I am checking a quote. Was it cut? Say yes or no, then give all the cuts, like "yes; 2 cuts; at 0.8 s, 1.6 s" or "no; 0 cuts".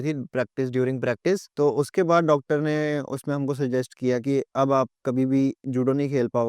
yes; 1 cut; at 1.5 s